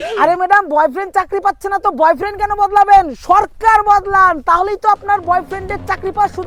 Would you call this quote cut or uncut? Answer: uncut